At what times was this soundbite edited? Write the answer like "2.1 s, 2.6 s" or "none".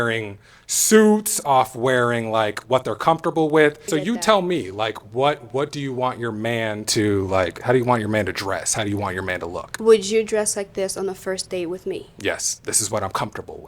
3.8 s